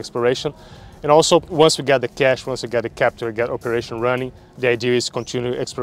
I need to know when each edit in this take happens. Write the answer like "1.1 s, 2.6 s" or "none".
1.5 s